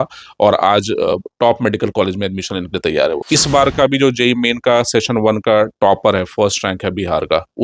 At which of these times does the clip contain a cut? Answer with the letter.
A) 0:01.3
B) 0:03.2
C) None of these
B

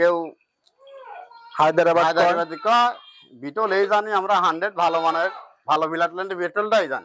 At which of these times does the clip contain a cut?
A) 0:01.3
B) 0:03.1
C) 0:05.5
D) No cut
D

